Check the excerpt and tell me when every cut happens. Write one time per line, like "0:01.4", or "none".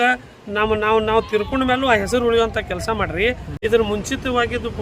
0:03.5